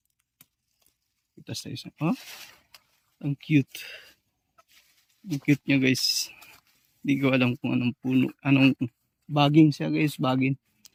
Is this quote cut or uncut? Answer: uncut